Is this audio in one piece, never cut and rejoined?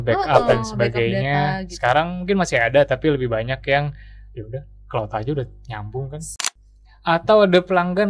no; 1 cut; at 6.3 s

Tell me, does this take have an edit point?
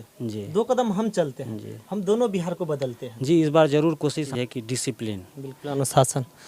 yes; 1 cut; at 4.3 s

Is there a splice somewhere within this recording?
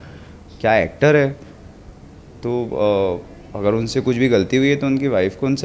no; 0 cuts

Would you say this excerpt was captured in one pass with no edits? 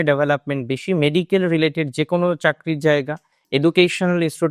yes; 0 cuts

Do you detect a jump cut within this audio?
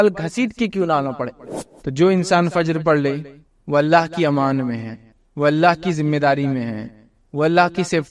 yes; 1 cut; at 1.4 s

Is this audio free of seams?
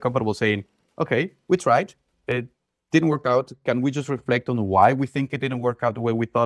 yes; 0 cuts

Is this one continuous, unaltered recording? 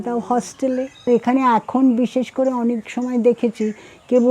no; 1 cut; at 1.1 s

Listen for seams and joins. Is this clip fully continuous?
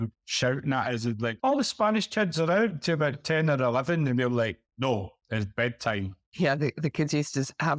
yes; 0 cuts

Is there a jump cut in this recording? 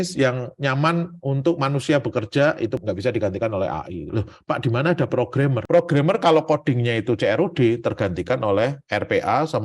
yes; 2 cuts; at 2.8 s, 4.1 s

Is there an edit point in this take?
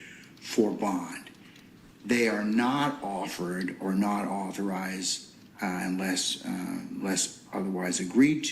yes; 1 cut; at 2.3 s

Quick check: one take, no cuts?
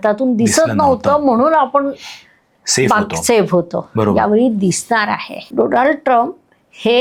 no; 1 cut; at 5.3 s

